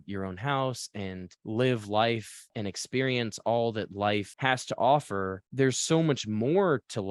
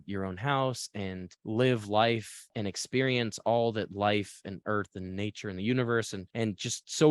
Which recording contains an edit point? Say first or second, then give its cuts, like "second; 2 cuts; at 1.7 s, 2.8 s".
first; 1 cut; at 4.3 s